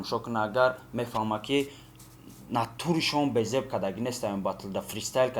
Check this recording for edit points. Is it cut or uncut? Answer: uncut